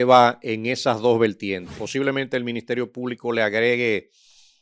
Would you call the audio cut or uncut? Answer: cut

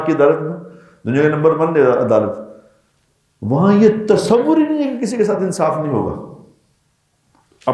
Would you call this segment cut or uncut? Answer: uncut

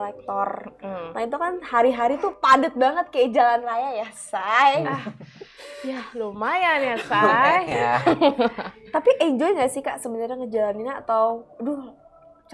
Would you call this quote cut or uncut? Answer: uncut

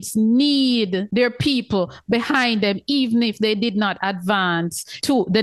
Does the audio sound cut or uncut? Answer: uncut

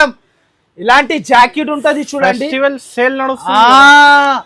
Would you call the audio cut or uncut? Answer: uncut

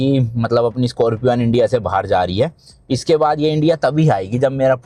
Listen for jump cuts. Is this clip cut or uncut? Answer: uncut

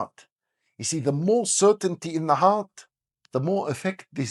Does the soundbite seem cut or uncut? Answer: uncut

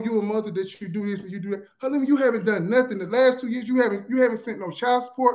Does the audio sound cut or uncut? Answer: uncut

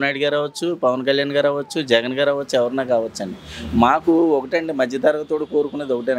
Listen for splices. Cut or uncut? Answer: uncut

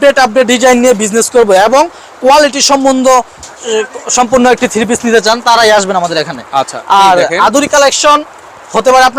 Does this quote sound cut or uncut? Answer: uncut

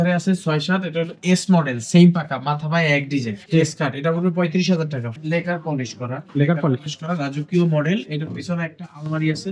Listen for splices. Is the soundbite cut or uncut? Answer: cut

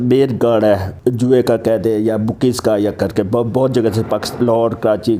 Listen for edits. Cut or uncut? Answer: cut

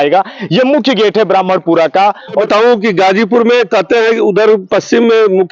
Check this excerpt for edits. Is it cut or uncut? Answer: cut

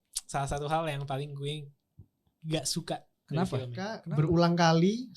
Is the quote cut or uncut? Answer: cut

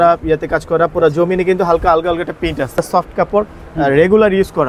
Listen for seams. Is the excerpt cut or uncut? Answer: cut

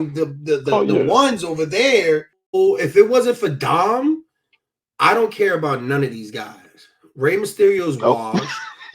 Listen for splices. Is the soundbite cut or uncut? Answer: cut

